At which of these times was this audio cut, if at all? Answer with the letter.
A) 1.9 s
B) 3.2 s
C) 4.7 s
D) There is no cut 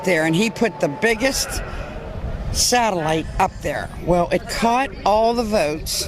C